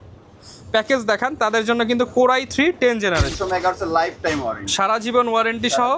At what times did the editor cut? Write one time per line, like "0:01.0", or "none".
0:03.3